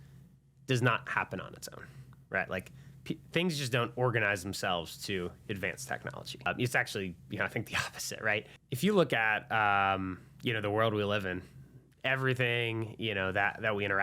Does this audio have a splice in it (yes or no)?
yes